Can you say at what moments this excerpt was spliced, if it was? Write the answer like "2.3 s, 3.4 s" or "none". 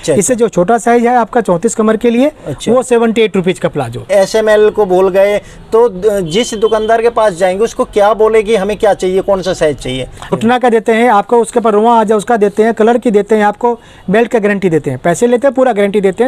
4.1 s, 10.3 s